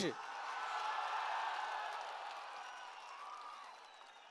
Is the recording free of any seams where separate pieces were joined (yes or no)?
yes